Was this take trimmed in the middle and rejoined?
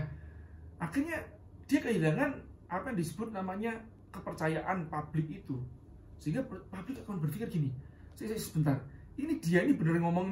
yes; 1 cut; at 3.9 s

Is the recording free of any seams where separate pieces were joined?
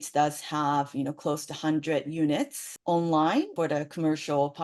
no; 2 cuts; at 2.6 s, 3.5 s

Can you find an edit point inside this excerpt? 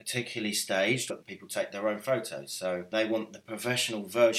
yes; 2 cuts; at 1.0 s, 2.8 s

